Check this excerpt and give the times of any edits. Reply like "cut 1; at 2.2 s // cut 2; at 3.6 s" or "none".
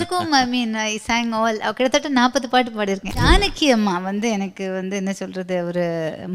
cut 1; at 3.1 s